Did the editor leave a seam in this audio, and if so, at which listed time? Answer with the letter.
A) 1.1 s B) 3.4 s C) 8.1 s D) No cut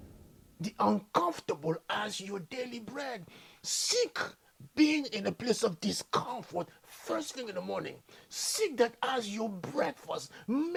D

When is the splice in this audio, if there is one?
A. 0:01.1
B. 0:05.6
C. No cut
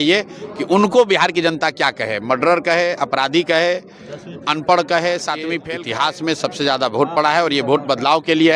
B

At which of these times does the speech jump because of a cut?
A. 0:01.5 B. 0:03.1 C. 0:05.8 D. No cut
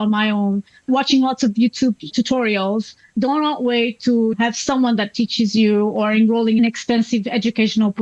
B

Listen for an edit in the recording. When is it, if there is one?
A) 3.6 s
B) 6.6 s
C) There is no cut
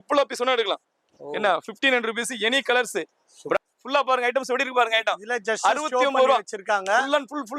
A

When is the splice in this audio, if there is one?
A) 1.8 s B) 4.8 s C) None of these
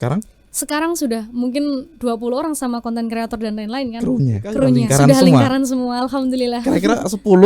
B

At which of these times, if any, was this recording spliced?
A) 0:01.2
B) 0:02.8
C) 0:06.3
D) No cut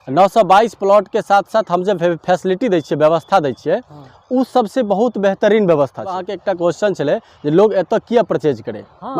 C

